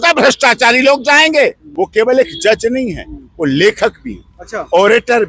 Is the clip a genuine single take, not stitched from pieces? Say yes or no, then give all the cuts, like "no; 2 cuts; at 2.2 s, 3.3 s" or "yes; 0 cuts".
no; 1 cut; at 1.6 s